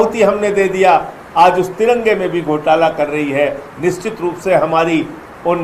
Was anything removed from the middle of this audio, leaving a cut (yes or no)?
no